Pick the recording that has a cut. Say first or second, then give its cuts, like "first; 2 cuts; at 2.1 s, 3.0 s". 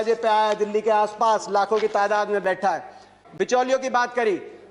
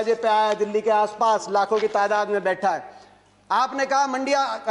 first; 1 cut; at 3.2 s